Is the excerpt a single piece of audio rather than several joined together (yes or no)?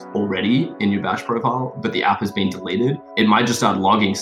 no